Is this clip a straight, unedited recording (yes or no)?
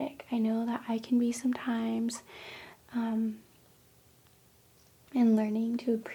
yes